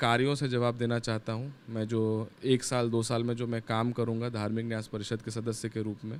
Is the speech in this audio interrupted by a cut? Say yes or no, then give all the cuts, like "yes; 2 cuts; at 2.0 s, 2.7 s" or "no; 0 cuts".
no; 0 cuts